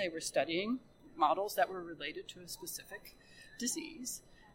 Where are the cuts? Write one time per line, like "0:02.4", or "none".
0:01.0